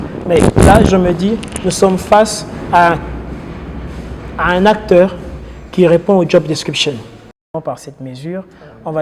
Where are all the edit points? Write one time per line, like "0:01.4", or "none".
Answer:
0:07.5